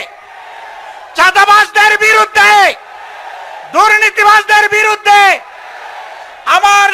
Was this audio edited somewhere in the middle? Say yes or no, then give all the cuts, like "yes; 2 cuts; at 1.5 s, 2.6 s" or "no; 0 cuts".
no; 0 cuts